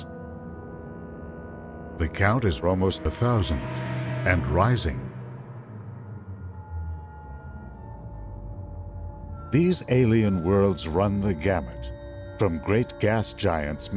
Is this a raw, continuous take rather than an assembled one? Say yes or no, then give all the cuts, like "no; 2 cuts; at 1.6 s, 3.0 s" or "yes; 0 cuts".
no; 1 cut; at 10.2 s